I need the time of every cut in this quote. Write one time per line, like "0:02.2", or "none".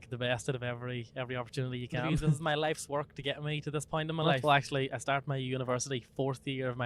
0:02.4
0:04.3